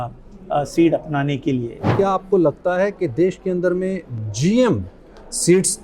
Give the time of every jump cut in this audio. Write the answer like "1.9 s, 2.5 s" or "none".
1.8 s